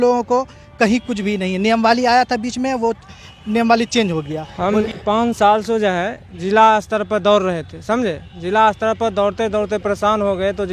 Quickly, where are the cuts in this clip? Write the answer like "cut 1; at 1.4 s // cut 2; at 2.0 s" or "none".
cut 1; at 4.4 s

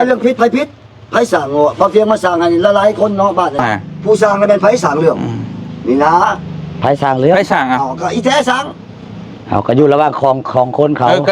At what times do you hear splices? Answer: cut 1; at 3.6 s

